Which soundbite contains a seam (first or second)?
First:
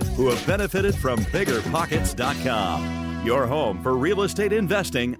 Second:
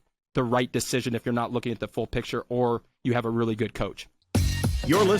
second